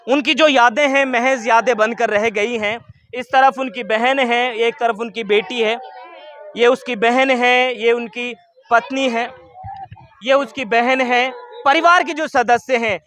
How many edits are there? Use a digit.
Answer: 0